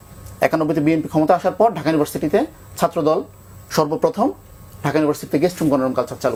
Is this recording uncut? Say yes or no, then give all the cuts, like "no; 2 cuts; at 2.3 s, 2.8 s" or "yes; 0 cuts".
yes; 0 cuts